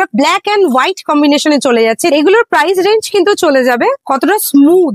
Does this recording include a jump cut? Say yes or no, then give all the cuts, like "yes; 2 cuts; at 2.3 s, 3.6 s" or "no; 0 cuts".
yes; 2 cuts; at 2.1 s, 4.0 s